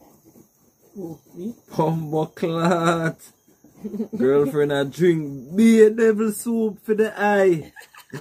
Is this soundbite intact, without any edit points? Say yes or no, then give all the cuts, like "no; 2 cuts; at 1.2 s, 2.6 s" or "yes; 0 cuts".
yes; 0 cuts